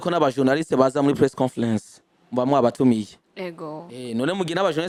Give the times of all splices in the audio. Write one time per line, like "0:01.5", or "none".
none